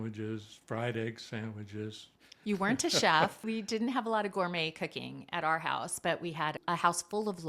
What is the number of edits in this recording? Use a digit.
2